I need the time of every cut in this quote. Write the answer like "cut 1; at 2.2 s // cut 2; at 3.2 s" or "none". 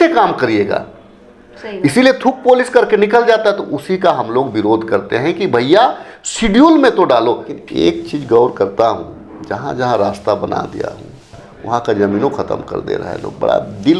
cut 1; at 7.6 s